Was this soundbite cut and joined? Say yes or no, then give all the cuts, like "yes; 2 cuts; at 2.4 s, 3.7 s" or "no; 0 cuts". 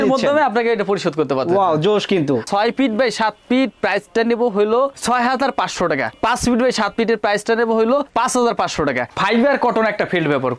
yes; 2 cuts; at 2.5 s, 9.1 s